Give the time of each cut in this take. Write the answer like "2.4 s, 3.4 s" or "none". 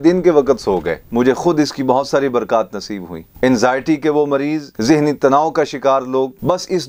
1.0 s, 3.3 s, 4.7 s